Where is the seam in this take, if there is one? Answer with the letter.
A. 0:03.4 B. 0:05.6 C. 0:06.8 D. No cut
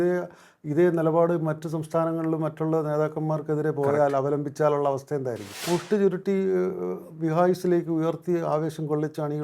B